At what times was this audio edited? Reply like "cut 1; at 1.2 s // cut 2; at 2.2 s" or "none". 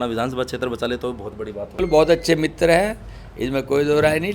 cut 1; at 1.8 s